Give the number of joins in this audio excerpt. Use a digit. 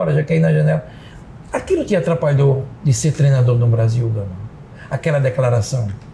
0